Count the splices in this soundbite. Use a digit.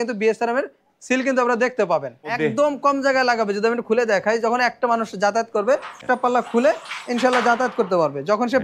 2